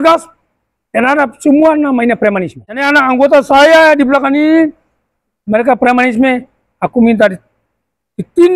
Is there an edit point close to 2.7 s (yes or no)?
yes